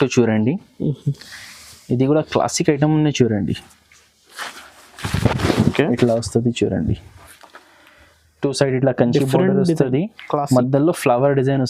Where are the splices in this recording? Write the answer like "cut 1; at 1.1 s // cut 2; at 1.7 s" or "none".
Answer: none